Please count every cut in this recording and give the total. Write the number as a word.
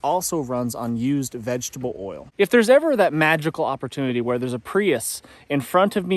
one